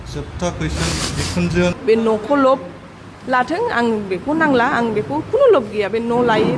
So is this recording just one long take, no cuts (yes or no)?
no